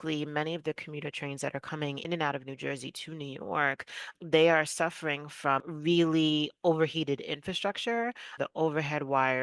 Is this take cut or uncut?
cut